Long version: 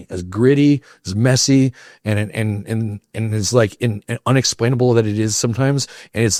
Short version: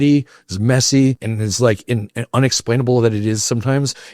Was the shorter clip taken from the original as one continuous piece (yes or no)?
no